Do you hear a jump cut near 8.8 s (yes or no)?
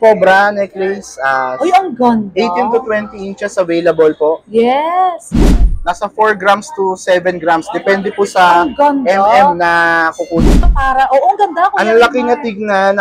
no